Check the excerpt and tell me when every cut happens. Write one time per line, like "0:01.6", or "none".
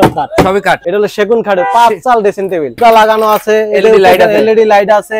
0:00.8
0:02.8

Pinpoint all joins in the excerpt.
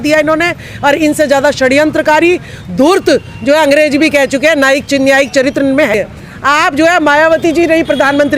0:05.9

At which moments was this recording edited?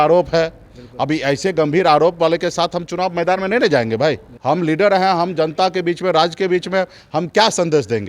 0:04.3

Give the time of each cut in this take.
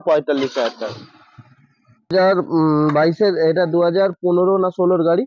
0:02.1

